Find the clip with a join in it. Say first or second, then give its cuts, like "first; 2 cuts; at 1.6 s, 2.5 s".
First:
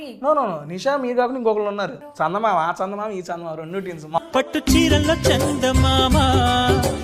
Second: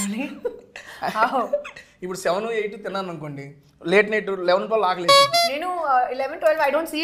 first; 2 cuts; at 2.0 s, 4.2 s